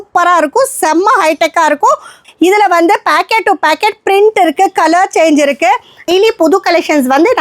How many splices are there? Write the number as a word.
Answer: two